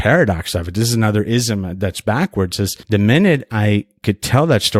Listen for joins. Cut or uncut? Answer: cut